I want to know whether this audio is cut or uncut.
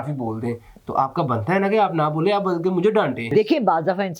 cut